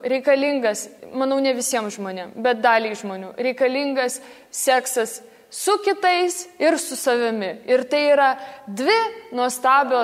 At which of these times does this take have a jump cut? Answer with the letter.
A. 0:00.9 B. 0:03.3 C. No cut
A